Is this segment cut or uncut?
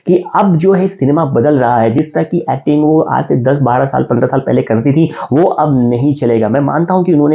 uncut